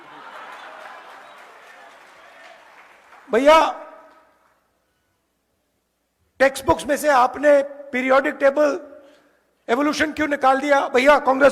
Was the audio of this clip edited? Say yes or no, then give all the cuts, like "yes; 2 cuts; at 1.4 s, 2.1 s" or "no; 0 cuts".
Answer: no; 0 cuts